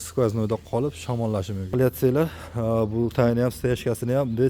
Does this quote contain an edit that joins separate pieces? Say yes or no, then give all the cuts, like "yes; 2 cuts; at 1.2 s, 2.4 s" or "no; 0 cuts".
yes; 1 cut; at 1.7 s